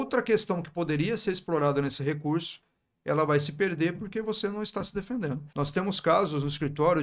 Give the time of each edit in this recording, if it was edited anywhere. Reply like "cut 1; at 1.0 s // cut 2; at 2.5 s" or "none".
cut 1; at 5.5 s